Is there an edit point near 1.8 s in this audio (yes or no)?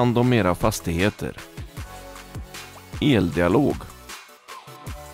no